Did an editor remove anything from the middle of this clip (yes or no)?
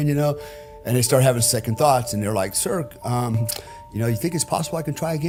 no